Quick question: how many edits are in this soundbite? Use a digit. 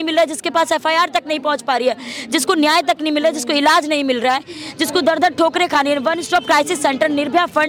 0